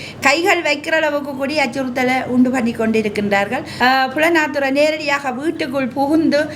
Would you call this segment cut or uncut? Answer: cut